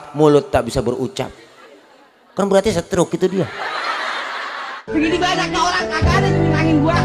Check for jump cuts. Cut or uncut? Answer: cut